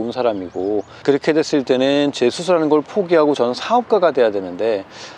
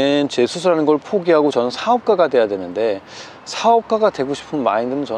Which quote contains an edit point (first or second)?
first